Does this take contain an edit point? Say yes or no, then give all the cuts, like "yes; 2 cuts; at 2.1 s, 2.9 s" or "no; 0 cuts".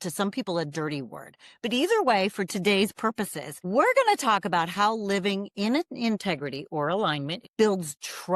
yes; 1 cut; at 7.4 s